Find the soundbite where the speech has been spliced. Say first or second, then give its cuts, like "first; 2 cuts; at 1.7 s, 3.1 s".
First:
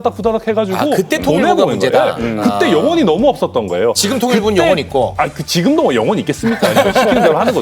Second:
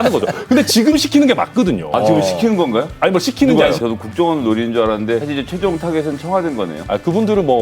second; 2 cuts; at 3.8 s, 5.2 s